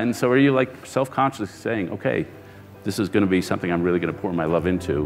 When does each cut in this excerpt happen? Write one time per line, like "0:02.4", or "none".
none